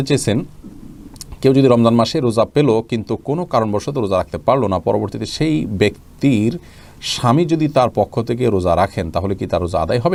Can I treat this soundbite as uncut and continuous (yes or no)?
yes